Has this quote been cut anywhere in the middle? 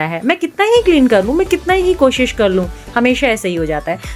no; 0 cuts

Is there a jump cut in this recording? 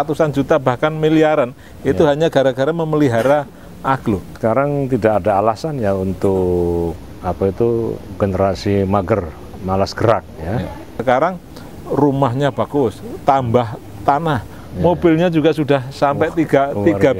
yes; 2 cuts; at 4.3 s, 11.0 s

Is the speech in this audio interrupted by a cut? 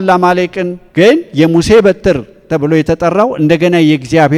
no; 0 cuts

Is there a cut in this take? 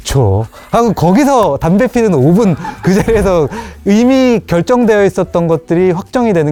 no; 0 cuts

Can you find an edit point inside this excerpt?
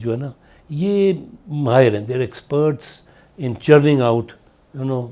no; 0 cuts

